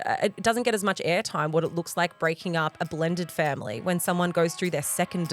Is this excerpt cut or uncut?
uncut